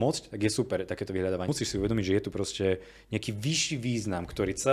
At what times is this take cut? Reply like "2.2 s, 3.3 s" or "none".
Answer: 1.5 s

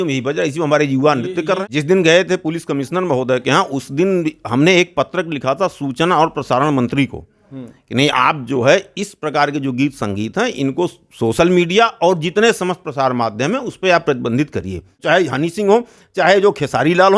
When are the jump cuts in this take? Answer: 1.6 s, 15.0 s

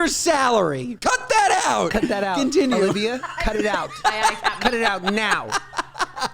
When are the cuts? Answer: 0.9 s

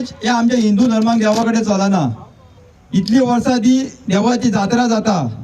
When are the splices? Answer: 2.5 s

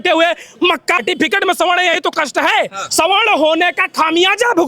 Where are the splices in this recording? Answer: 1.0 s

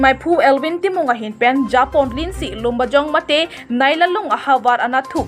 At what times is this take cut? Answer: none

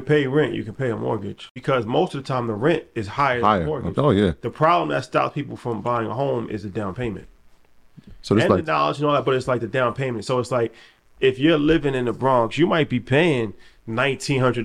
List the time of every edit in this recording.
1.5 s

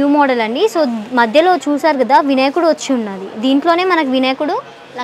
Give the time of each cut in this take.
none

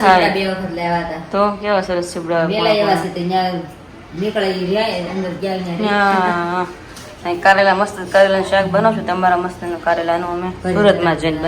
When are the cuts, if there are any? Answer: none

